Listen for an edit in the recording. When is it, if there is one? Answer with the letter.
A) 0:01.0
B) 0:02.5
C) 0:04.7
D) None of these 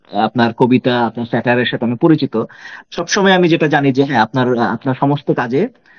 D